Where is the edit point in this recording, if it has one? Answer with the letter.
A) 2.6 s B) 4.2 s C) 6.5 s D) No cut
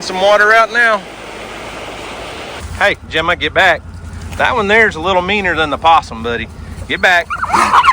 A